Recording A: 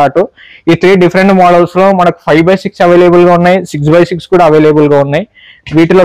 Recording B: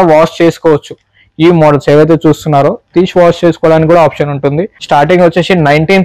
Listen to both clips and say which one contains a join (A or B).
B